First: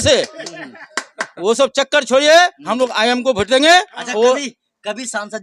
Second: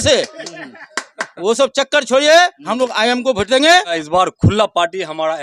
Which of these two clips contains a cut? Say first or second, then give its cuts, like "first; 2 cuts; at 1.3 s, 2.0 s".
second; 1 cut; at 4.0 s